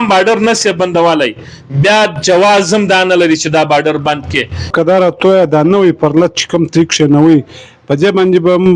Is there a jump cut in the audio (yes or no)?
yes